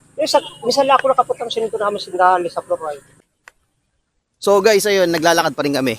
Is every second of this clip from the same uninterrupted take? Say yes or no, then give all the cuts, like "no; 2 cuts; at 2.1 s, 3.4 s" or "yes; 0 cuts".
no; 1 cut; at 3.1 s